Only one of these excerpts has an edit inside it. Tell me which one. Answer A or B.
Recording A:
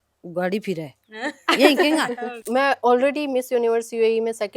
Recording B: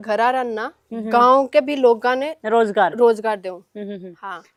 A